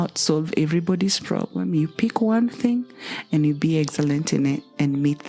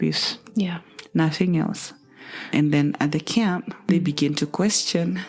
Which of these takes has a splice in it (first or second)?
second